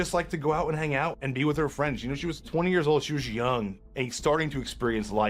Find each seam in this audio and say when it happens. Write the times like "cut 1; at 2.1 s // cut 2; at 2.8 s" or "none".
cut 1; at 1.2 s // cut 2; at 2.5 s // cut 3; at 3.8 s

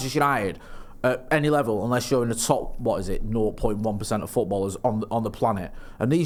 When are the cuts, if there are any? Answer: none

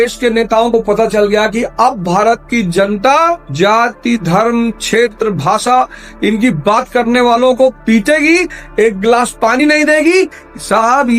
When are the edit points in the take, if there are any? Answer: none

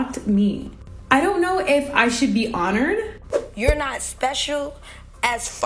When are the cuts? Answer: cut 1; at 3.3 s

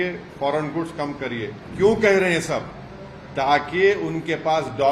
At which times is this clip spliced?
cut 1; at 1.6 s

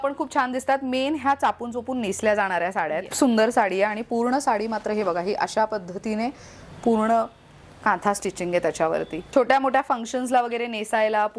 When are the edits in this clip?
cut 1; at 3.1 s // cut 2; at 9.2 s

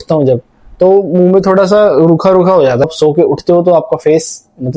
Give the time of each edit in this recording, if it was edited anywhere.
cut 1; at 2.8 s

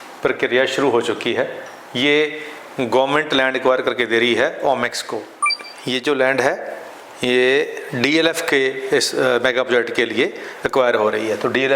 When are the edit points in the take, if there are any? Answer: cut 1; at 5.4 s

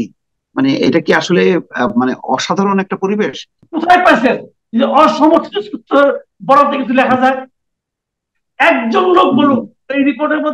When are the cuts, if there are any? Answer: cut 1; at 3.5 s

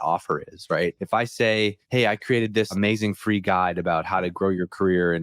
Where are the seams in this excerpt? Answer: cut 1; at 1.0 s // cut 2; at 1.8 s // cut 3; at 2.7 s

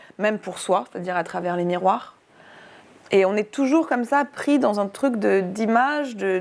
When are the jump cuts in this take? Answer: none

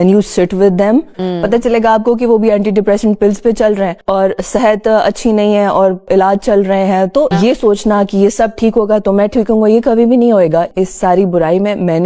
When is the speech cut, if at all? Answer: cut 1; at 7.3 s // cut 2; at 10.7 s

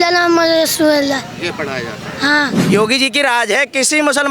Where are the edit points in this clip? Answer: cut 1; at 2.6 s

